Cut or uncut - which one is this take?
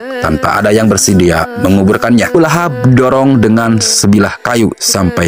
cut